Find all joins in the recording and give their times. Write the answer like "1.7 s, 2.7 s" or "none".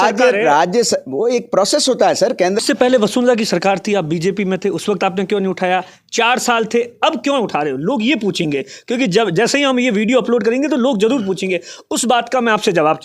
2.6 s